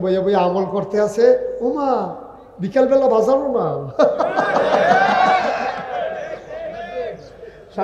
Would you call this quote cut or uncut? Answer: uncut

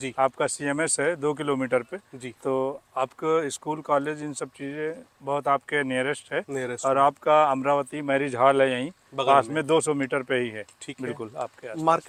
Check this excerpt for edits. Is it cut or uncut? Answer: uncut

